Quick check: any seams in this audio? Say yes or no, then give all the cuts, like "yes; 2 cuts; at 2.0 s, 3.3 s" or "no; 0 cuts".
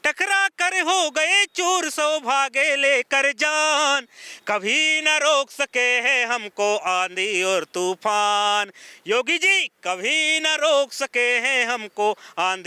no; 0 cuts